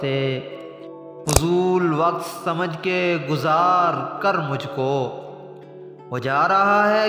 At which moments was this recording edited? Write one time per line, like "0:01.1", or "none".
0:01.1

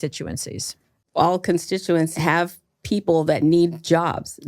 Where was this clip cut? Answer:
0:01.0
0:02.1

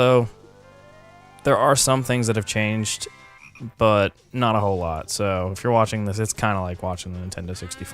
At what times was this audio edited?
0:04.0

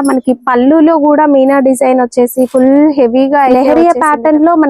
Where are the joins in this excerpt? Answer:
0:03.5

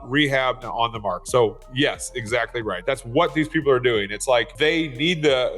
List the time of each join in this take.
0:01.2
0:02.8
0:04.5

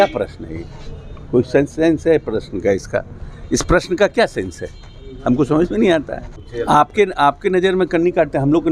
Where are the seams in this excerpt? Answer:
none

